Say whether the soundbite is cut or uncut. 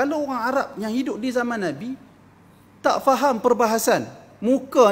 uncut